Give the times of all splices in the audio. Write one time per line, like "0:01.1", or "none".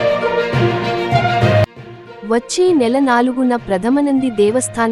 0:01.5